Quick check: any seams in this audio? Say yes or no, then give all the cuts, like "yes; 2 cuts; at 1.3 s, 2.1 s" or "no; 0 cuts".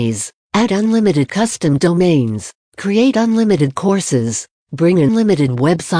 no; 0 cuts